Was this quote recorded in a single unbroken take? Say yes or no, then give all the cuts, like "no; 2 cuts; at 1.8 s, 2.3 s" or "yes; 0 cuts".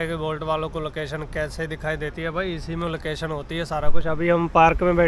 yes; 0 cuts